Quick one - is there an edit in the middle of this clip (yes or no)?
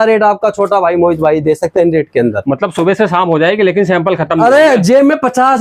no